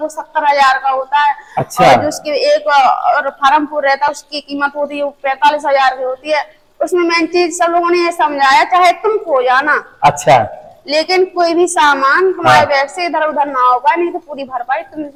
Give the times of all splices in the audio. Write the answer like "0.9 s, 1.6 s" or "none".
none